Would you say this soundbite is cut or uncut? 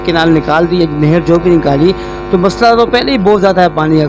uncut